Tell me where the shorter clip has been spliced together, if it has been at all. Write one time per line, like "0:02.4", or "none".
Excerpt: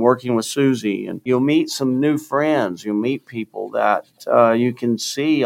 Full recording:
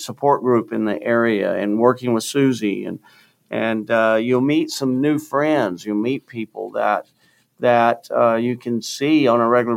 0:01.2
0:04.2